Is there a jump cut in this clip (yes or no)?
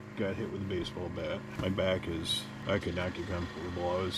yes